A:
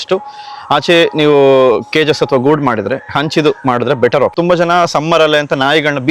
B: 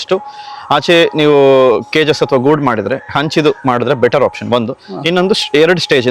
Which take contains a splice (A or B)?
A